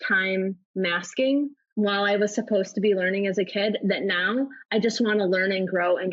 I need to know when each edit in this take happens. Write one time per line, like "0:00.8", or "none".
0:01.6

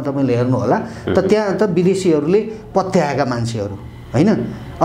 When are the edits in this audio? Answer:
none

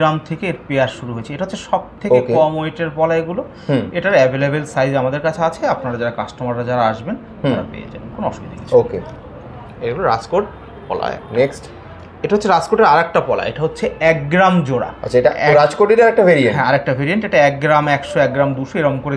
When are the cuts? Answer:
none

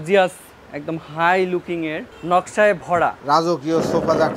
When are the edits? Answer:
0:02.1
0:03.2

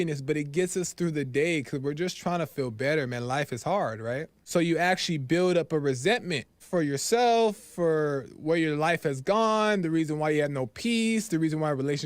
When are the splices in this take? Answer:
0:04.3
0:06.6

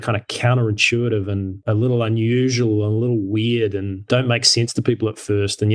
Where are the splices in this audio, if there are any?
0:01.6
0:03.9

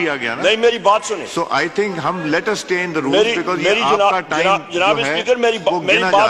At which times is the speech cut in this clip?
none

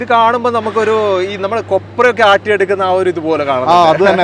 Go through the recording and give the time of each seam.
none

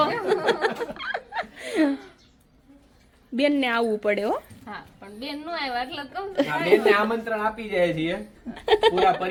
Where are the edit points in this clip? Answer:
none

